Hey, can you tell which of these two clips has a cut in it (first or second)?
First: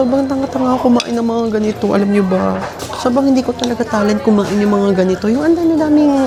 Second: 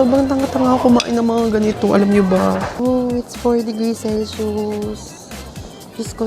second